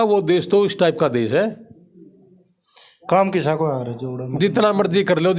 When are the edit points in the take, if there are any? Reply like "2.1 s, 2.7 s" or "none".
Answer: none